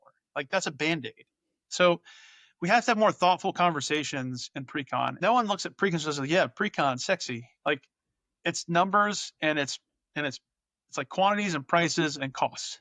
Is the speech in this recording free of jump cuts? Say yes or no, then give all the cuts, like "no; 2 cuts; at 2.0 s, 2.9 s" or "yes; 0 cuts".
no; 1 cut; at 5.1 s